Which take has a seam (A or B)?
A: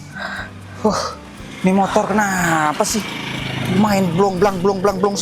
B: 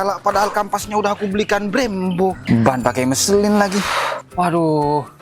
B